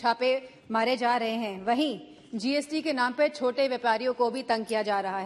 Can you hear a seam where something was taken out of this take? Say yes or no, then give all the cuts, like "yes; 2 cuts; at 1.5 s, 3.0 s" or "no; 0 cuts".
no; 0 cuts